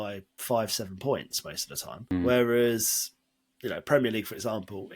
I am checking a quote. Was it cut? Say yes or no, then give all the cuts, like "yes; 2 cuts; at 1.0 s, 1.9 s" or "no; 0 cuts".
yes; 1 cut; at 2.1 s